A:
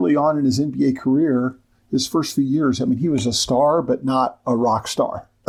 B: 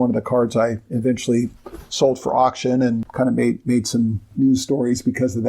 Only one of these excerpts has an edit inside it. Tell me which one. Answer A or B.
B